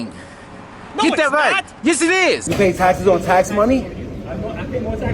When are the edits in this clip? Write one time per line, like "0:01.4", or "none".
0:02.4